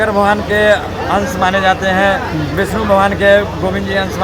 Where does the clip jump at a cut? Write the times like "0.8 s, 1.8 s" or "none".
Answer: none